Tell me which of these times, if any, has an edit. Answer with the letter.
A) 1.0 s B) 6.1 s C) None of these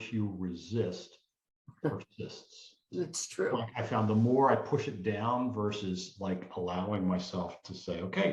C